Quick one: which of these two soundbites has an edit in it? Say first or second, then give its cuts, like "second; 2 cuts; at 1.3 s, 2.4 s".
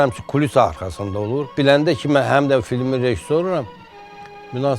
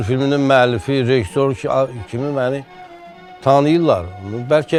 first; 1 cut; at 1.5 s